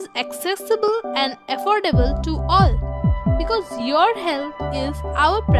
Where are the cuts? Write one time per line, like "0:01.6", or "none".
none